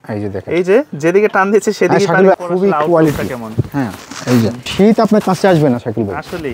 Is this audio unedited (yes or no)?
no